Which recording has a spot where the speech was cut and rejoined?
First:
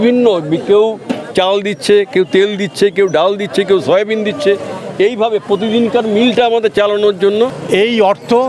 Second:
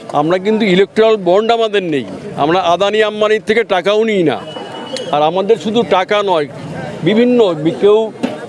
first; 1 cut; at 7.6 s

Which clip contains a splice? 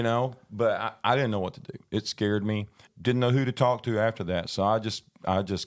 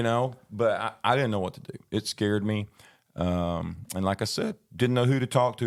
first; 1 cut; at 2.9 s

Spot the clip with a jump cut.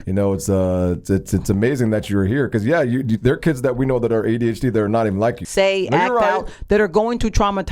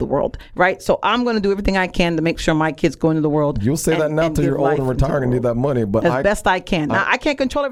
first; 1 cut; at 5.4 s

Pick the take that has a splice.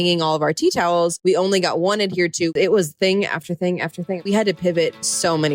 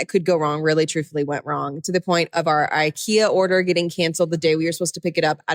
first; 3 cuts; at 1.2 s, 2.5 s, 4.2 s

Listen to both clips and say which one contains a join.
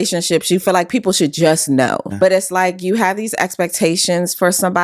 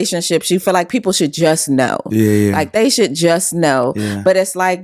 first; 1 cut; at 2.1 s

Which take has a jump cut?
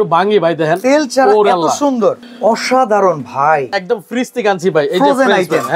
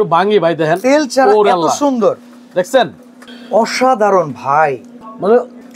first; 2 cuts; at 2.3 s, 3.8 s

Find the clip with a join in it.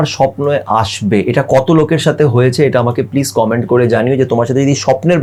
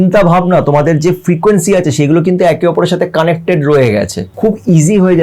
second; 1 cut; at 4.2 s

